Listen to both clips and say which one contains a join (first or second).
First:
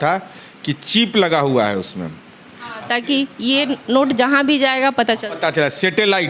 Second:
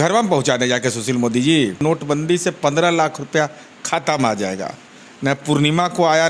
second